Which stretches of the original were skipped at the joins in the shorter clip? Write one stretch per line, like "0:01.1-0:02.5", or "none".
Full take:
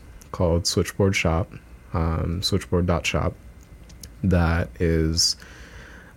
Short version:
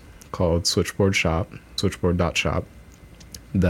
0:01.7-0:02.4